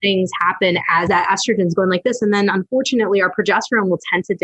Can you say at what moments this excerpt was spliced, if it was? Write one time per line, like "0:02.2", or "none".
0:01.1

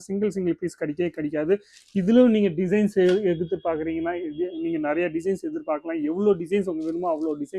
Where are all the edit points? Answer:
none

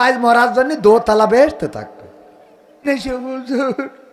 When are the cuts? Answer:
0:02.9

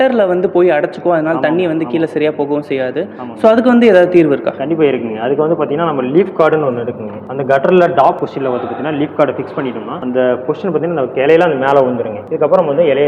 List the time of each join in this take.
none

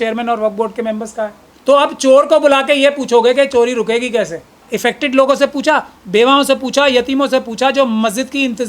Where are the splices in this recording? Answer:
0:01.4
0:04.6

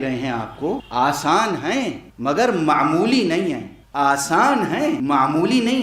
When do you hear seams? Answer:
0:00.9
0:02.1
0:03.8
0:05.0

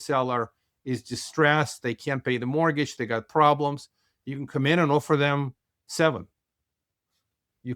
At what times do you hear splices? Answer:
none

